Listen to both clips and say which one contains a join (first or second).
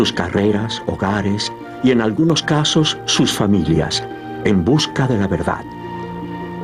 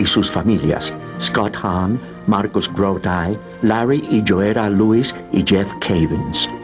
second